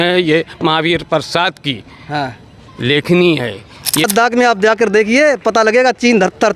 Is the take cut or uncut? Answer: cut